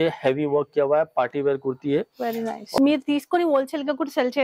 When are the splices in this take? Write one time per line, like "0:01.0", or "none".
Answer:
0:02.8